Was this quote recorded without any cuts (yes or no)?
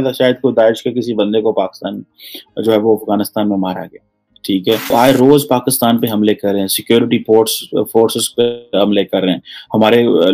no